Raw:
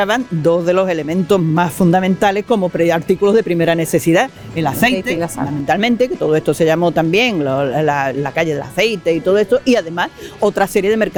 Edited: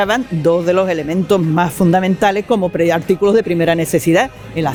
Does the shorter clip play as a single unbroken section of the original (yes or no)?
yes